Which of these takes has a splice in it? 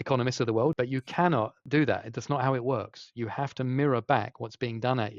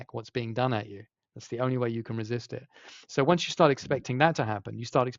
first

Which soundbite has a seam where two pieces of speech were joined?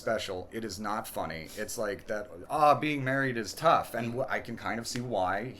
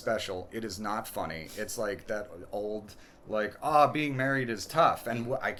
first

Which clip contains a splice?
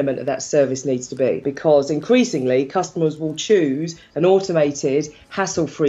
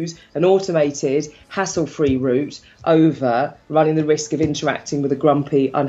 first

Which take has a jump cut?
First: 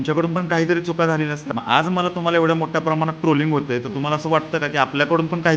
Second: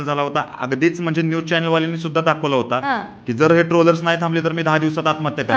first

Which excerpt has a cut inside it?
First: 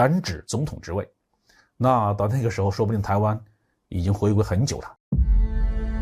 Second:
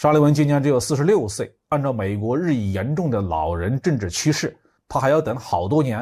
first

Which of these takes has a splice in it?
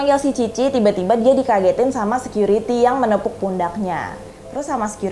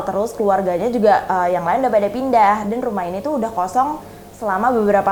first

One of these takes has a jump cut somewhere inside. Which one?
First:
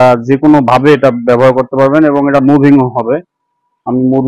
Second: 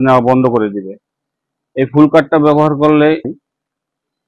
second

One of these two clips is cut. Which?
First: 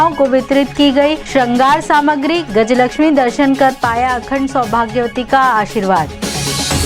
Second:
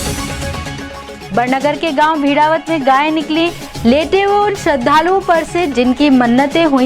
second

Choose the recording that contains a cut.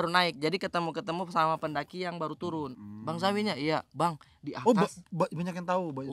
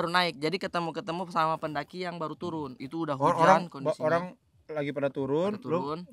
first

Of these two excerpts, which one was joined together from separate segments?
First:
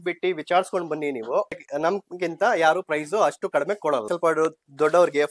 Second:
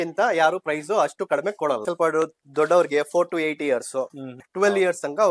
second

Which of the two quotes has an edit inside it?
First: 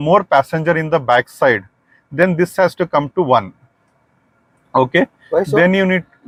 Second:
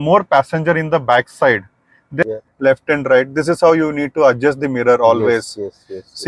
second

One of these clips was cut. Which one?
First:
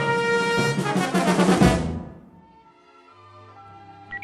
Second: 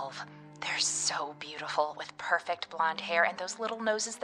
first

